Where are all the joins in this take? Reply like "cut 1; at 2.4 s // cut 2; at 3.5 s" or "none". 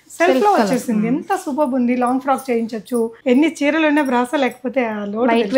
cut 1; at 3.2 s